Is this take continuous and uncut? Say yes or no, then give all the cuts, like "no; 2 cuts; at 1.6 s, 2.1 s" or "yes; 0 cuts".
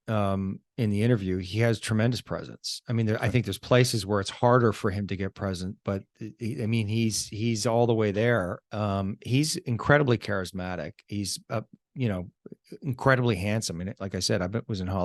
yes; 0 cuts